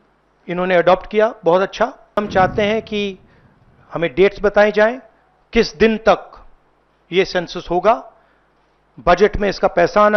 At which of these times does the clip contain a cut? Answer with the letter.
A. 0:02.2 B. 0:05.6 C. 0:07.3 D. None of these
A